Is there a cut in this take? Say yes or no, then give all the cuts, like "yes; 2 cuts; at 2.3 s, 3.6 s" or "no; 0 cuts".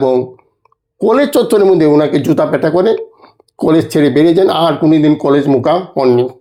no; 0 cuts